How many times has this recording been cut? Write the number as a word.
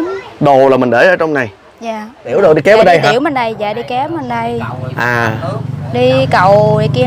one